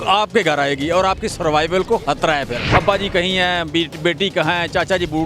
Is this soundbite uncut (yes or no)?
no